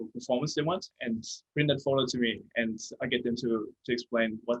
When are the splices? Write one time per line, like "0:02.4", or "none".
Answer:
0:00.9